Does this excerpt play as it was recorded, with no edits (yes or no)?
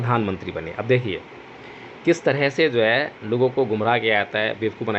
yes